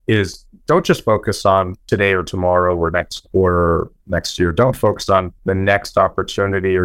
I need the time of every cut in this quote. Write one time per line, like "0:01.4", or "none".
0:01.8
0:05.3